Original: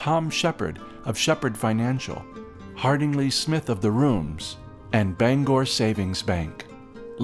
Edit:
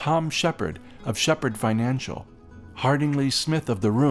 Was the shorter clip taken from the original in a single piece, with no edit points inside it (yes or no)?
yes